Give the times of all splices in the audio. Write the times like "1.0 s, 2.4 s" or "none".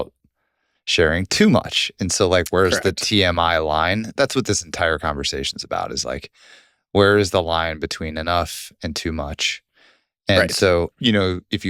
none